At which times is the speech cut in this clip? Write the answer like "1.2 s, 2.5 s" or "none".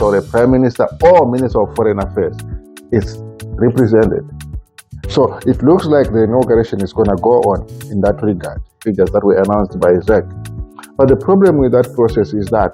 8.8 s